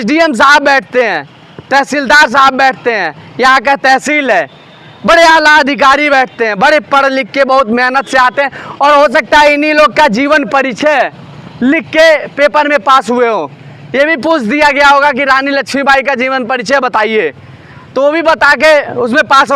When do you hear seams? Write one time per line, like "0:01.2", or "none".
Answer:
none